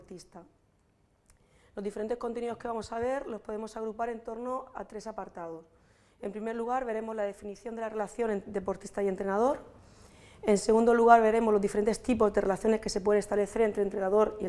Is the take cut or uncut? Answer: cut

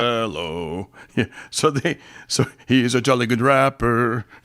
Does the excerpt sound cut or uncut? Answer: uncut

